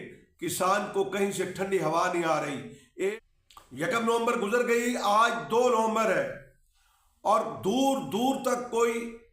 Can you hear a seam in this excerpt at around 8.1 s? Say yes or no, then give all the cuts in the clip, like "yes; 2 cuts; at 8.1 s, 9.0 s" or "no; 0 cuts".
no; 1 cut; at 3.1 s